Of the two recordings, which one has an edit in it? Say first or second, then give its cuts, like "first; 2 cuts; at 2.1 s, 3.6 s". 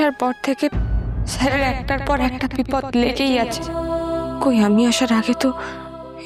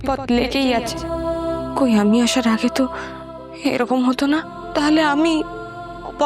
second; 1 cut; at 4.6 s